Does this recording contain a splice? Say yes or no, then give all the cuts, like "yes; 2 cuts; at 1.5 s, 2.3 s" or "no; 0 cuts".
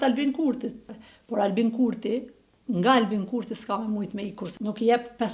yes; 2 cuts; at 0.9 s, 4.4 s